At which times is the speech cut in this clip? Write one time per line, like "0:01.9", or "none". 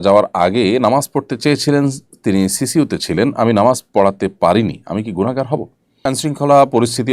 0:06.0